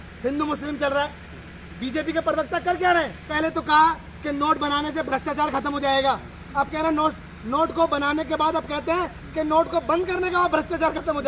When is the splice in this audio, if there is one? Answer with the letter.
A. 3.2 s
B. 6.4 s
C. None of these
A